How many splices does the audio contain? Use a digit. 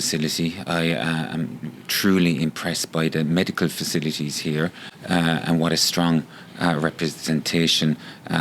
0